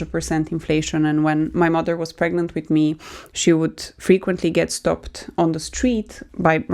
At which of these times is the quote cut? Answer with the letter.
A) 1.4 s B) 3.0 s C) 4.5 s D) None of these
D